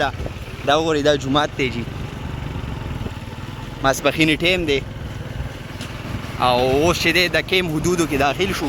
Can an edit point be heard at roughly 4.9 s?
no; 0 cuts

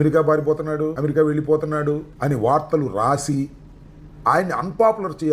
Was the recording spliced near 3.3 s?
no; 2 cuts; at 1.0 s, 2.1 s

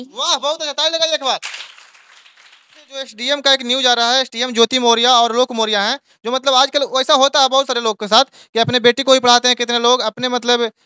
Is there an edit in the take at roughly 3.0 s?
yes; 1 cut; at 3.0 s

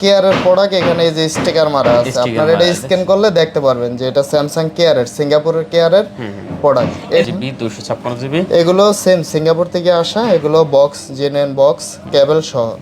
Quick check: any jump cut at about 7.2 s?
yes; 1 cut; at 7.2 s

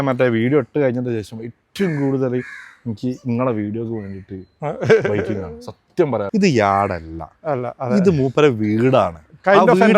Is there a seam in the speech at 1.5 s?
no; 1 cut; at 6.2 s

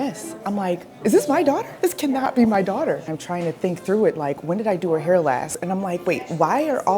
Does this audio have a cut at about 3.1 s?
yes; 3 cuts; at 0.9 s, 3.1 s, 5.6 s

